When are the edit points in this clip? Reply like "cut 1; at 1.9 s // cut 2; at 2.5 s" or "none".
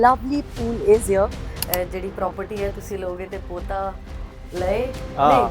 cut 1; at 1.5 s